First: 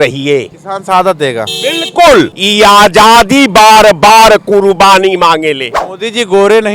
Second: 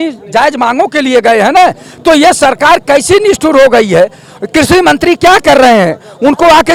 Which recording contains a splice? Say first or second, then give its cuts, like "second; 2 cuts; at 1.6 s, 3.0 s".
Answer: first; 2 cuts; at 2.4 s, 5.8 s